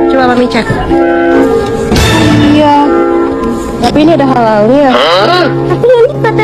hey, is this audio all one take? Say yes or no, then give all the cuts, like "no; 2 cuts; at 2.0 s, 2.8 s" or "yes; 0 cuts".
no; 2 cuts; at 1.4 s, 3.9 s